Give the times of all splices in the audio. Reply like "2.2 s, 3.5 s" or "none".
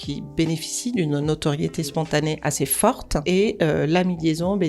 2.4 s, 3.2 s